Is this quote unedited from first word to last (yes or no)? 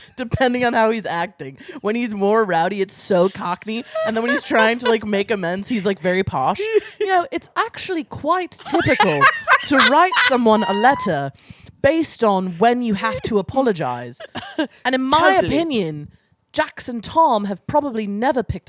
yes